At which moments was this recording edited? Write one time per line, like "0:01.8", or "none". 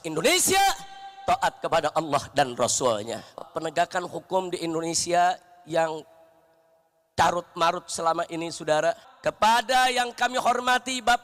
0:03.4
0:09.1